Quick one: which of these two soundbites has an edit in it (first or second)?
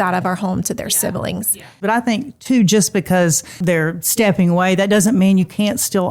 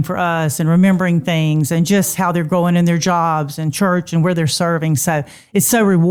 first